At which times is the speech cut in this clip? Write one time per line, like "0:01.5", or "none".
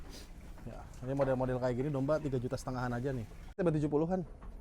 0:03.6